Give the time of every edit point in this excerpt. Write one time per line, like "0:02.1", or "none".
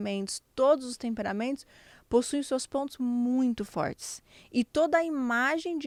none